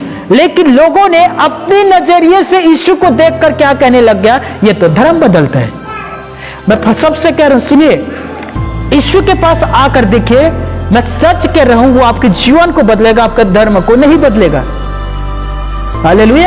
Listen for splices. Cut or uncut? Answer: uncut